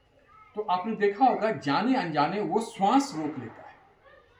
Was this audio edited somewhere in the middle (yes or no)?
no